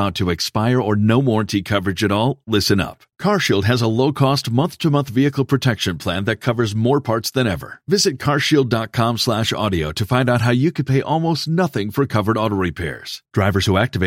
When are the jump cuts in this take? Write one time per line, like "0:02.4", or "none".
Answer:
none